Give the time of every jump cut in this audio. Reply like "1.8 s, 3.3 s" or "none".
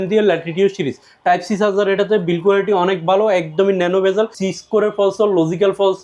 4.4 s

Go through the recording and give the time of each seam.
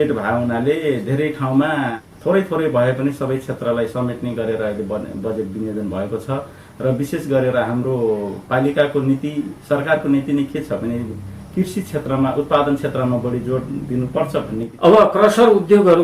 2.0 s, 14.6 s

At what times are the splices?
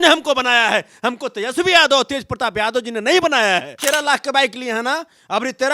3.7 s

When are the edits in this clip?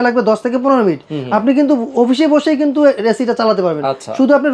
none

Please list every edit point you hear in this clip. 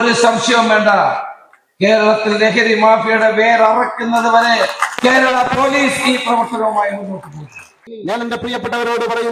7.8 s

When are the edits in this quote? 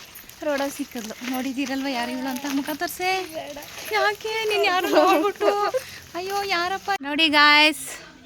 7.0 s

